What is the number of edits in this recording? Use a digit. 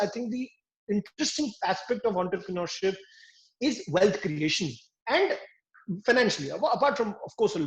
0